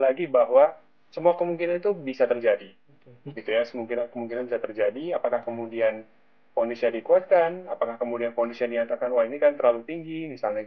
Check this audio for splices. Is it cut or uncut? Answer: uncut